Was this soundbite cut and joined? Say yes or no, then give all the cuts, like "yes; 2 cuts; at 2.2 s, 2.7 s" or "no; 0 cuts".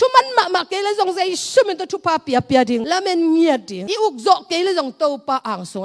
yes; 1 cut; at 2.8 s